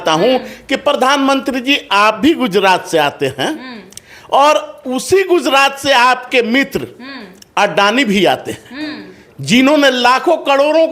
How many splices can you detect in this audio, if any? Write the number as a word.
zero